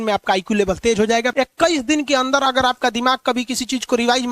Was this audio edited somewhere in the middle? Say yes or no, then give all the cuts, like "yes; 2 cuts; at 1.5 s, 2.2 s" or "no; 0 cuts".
yes; 1 cut; at 1.3 s